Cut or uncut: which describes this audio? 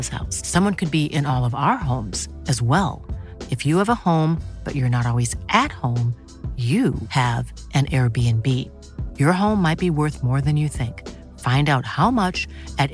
uncut